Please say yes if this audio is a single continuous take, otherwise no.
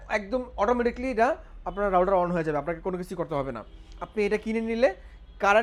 yes